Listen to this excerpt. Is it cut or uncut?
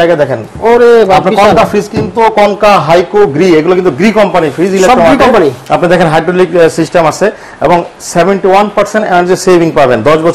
uncut